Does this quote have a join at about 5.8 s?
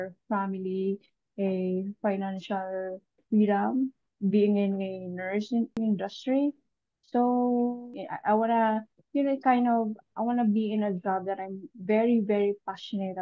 yes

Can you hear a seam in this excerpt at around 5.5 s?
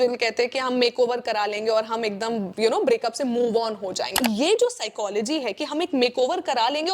no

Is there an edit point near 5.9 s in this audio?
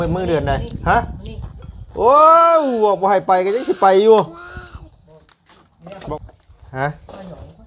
yes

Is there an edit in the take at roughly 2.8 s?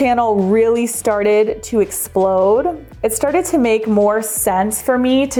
no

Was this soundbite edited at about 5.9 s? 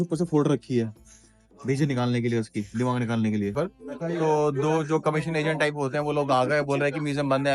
no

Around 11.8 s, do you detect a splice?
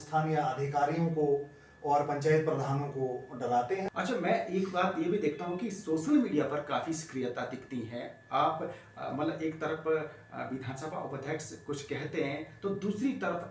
no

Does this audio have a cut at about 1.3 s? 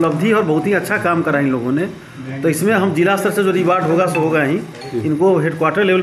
no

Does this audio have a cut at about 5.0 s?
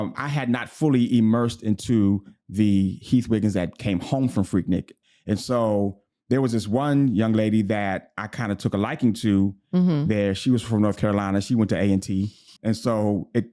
yes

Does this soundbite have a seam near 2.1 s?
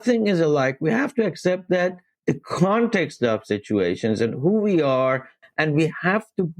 yes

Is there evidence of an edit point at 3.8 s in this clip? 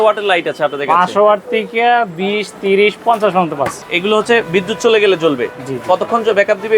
yes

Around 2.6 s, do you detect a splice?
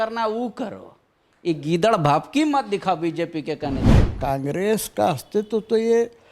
no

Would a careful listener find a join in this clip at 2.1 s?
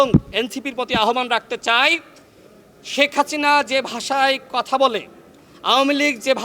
no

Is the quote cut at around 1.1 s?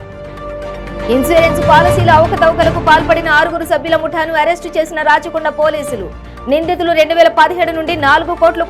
yes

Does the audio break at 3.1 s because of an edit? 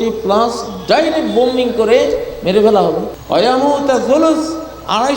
yes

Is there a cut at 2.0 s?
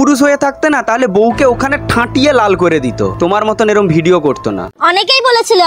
no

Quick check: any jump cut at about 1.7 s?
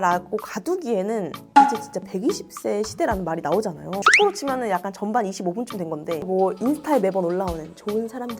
no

